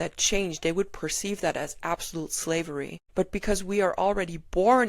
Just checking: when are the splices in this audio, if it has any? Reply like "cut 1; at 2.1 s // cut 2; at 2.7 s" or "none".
cut 1; at 3.0 s